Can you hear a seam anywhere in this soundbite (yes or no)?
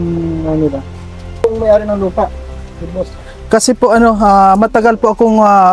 yes